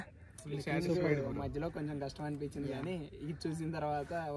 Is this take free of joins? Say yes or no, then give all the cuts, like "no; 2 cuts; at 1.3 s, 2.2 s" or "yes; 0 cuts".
yes; 0 cuts